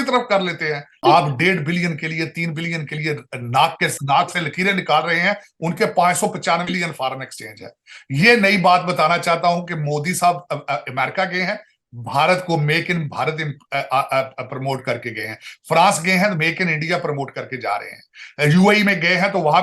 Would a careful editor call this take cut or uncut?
cut